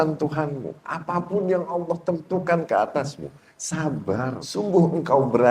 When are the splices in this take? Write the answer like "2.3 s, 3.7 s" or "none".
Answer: 4.4 s